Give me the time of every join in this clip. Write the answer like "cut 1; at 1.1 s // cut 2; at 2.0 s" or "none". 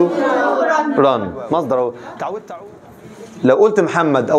cut 1; at 2.4 s